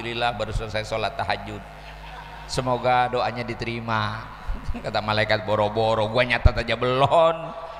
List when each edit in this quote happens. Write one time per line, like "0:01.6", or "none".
none